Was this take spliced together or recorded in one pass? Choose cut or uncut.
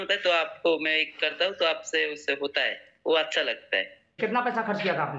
cut